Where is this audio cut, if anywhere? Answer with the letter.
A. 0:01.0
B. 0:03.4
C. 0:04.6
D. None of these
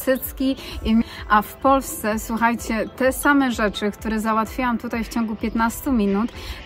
A